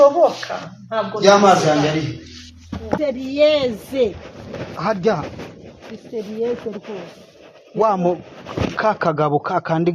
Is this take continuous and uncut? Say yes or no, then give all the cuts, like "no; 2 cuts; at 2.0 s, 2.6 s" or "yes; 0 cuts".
no; 1 cut; at 3.0 s